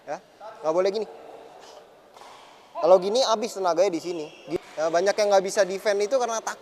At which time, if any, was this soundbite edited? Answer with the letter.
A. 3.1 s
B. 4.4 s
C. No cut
B